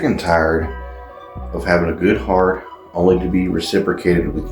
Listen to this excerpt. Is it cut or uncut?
uncut